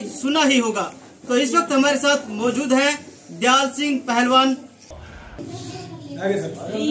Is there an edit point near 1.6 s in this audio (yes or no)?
no